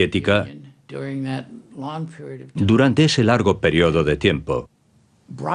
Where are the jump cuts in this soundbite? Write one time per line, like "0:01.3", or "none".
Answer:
0:01.2